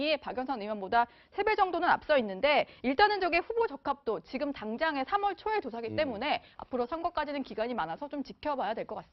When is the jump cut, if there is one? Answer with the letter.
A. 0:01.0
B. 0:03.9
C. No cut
B